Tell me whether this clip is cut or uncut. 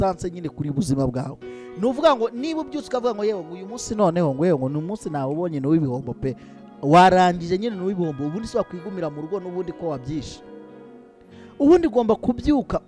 uncut